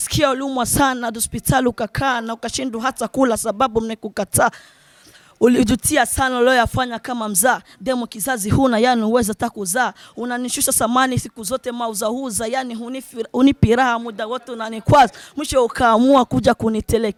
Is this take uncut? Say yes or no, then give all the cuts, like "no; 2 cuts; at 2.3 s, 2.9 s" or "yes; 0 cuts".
yes; 0 cuts